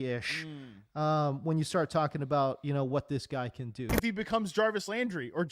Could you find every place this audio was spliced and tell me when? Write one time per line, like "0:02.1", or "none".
0:03.9